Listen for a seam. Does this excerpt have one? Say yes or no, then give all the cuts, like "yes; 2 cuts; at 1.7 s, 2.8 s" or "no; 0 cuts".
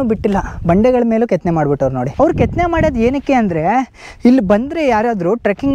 no; 0 cuts